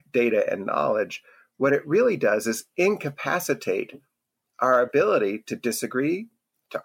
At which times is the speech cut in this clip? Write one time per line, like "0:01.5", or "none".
none